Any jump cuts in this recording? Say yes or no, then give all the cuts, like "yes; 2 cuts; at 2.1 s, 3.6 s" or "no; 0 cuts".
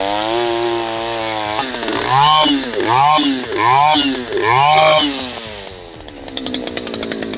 yes; 1 cut; at 1.6 s